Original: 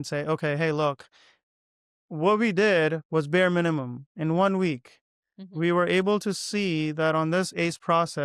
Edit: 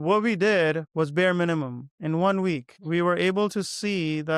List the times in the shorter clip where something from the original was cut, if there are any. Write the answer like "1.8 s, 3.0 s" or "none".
2.7 s